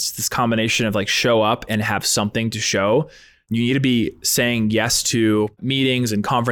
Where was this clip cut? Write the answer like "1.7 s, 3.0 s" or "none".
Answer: 3.4 s, 5.6 s